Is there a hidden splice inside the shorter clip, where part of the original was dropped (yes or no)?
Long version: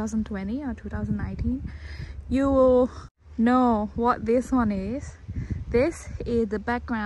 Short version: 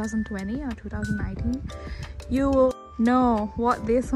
yes